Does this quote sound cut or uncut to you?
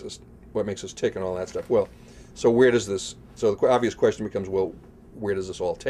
cut